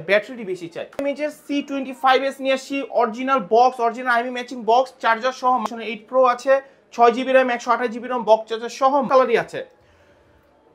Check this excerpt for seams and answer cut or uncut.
cut